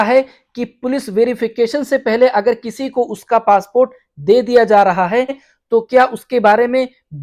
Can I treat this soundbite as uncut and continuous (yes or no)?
yes